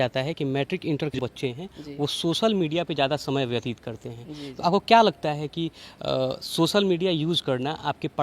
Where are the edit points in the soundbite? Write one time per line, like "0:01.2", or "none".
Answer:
0:01.1